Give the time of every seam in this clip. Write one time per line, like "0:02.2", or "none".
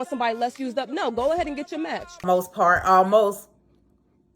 0:02.2